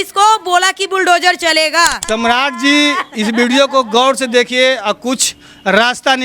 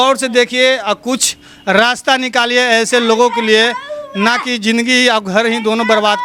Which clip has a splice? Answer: first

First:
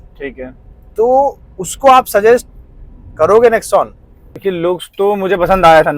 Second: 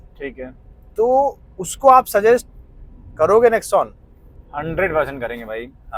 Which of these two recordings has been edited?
first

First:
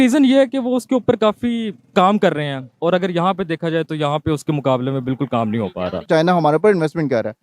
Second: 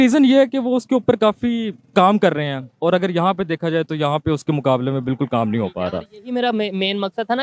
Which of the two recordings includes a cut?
first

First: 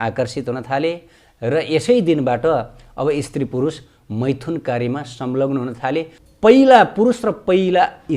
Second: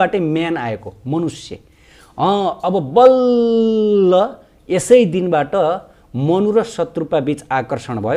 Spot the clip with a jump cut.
first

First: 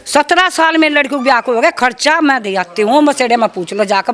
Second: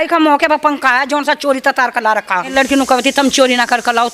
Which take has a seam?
second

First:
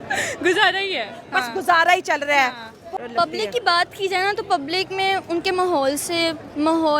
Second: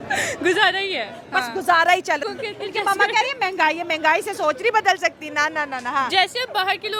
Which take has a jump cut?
first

